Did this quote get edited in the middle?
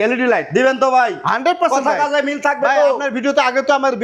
no; 0 cuts

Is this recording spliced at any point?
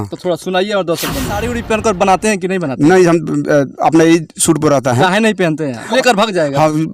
yes; 2 cuts; at 1.5 s, 5.9 s

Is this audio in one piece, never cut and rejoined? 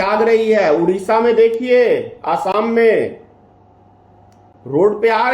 yes; 0 cuts

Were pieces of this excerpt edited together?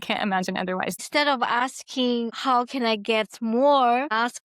yes; 2 cuts; at 1.0 s, 2.4 s

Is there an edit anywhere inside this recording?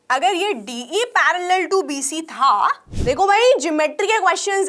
yes; 1 cut; at 2.9 s

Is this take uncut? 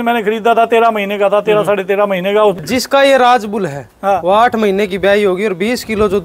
no; 1 cut; at 2.6 s

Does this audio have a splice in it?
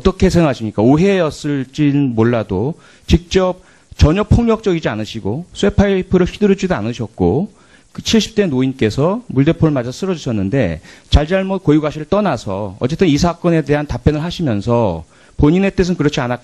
no; 0 cuts

